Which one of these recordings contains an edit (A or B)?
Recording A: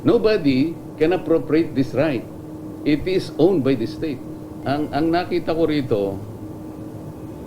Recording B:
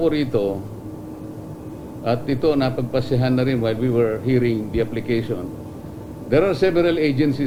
A